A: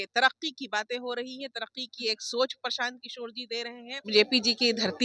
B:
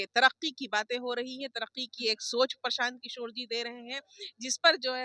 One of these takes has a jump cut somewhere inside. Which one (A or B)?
A